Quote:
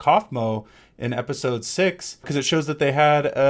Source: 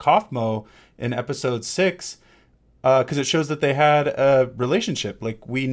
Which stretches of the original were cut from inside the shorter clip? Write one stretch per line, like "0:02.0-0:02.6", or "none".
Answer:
0:02.3-0:03.1